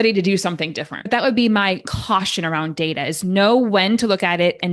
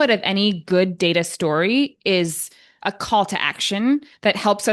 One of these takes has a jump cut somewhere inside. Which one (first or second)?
first